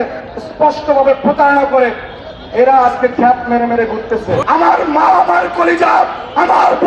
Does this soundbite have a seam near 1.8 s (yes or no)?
no